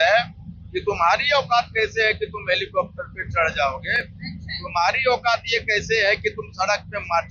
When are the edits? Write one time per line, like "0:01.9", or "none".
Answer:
none